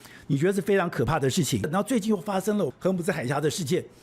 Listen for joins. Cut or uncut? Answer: cut